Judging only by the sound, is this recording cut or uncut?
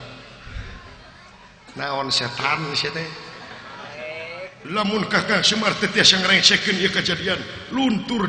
uncut